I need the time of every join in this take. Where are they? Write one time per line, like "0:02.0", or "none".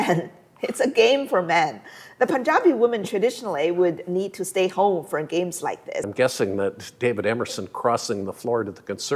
0:06.1